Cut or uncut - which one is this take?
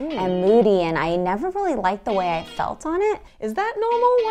cut